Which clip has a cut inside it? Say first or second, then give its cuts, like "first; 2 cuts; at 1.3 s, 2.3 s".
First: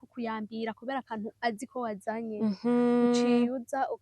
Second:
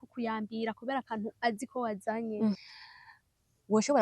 second; 1 cut; at 2.6 s